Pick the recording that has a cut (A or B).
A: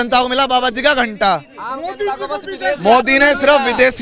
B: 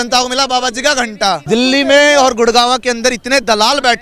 B